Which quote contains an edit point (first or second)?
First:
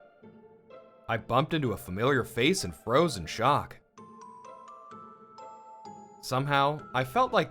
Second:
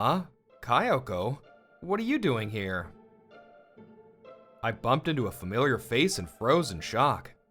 first